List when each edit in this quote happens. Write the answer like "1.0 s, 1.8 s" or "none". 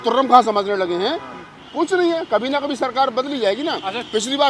none